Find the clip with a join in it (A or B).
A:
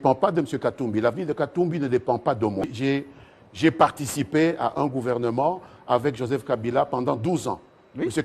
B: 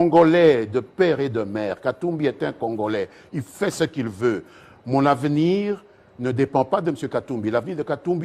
A